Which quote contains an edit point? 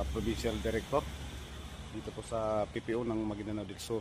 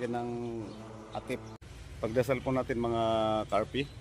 second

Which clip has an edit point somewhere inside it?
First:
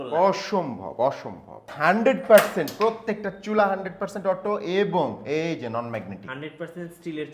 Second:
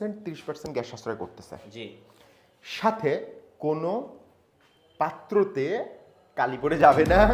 first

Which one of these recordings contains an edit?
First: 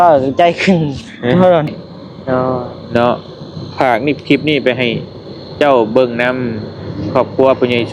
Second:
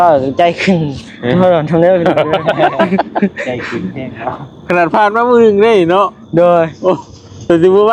first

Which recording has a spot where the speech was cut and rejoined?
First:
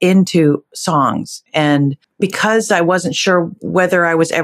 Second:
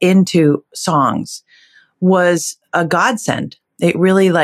first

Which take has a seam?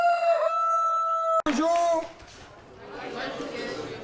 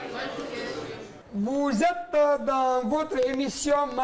first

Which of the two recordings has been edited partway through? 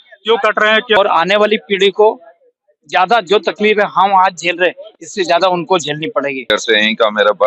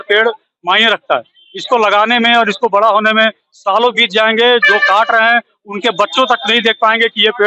first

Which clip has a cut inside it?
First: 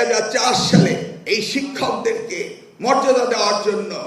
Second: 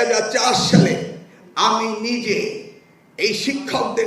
first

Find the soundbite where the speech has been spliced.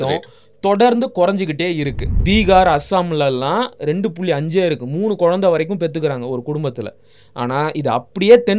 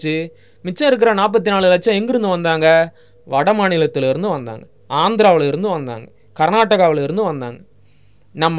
first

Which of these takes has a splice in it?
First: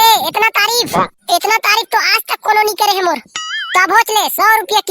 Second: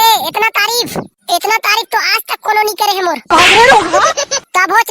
first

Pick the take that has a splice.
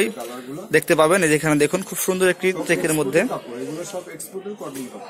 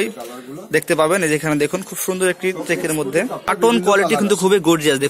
second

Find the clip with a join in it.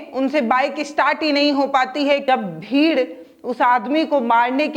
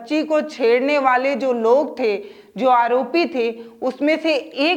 first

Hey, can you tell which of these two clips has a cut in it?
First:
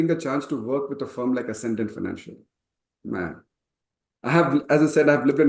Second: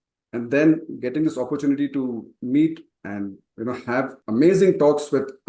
second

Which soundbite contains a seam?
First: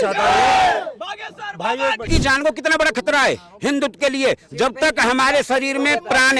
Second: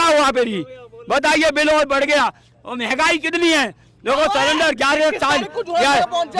first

